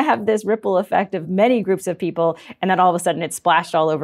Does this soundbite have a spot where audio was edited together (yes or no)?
yes